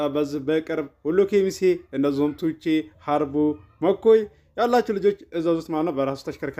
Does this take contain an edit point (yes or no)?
no